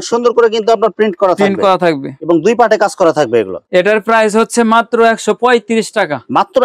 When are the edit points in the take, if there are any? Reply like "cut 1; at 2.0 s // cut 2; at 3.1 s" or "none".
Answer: none